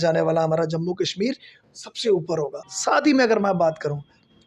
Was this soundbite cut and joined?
yes; 1 cut; at 2.6 s

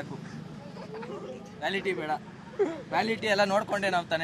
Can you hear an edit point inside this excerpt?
no; 0 cuts

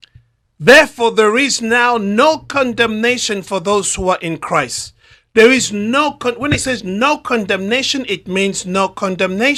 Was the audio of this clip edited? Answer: no; 0 cuts

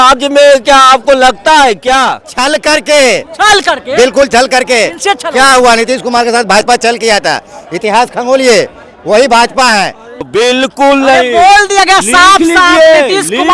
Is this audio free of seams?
no; 2 cuts; at 2.3 s, 10.2 s

